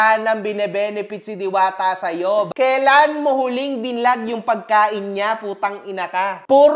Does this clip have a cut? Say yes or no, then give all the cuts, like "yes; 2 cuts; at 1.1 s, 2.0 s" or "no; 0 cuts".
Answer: yes; 1 cut; at 2.5 s